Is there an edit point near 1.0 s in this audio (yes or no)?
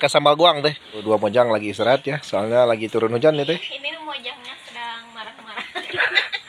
yes